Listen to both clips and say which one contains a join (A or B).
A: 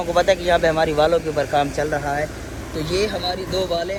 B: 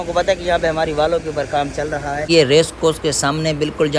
B